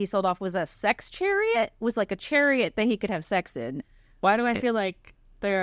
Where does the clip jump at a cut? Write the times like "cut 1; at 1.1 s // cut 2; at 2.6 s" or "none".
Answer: cut 1; at 3.8 s